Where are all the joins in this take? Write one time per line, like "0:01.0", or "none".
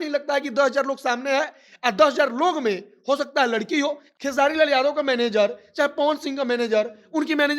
0:04.0